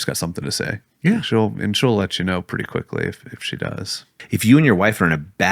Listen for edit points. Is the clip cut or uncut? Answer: cut